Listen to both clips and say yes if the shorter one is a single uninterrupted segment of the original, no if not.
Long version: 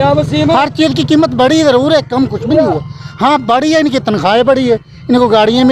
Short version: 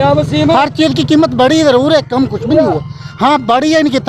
yes